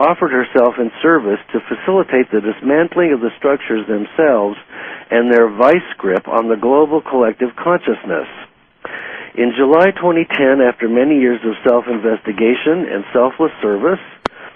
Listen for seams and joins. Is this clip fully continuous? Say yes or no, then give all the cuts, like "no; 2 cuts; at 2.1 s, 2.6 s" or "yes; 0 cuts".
no; 1 cut; at 1.1 s